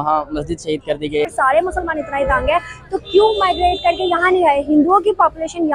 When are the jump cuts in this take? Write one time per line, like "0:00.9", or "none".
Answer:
0:01.3